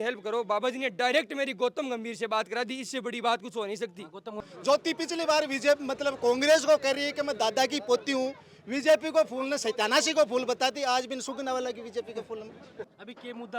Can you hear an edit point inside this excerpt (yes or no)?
yes